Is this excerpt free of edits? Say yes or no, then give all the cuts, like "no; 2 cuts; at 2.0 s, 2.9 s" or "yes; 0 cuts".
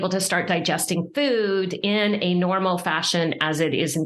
yes; 0 cuts